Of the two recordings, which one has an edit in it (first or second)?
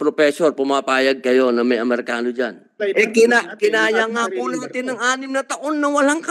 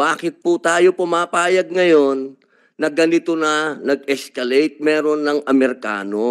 first